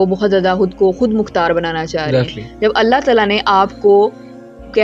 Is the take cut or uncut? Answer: uncut